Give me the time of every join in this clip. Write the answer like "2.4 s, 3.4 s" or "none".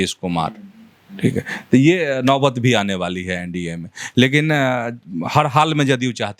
none